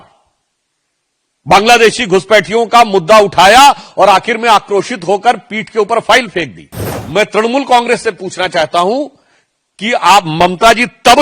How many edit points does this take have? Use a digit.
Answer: 0